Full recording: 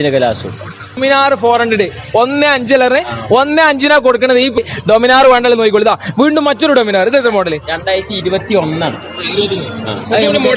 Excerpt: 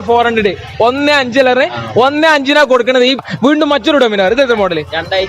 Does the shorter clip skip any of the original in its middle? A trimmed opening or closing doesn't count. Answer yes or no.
yes